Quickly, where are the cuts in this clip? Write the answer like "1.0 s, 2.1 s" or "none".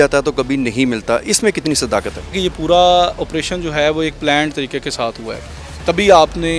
2.4 s